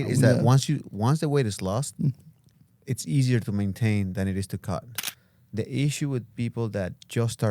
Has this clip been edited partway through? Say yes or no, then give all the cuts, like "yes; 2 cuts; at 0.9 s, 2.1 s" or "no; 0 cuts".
yes; 1 cut; at 5.0 s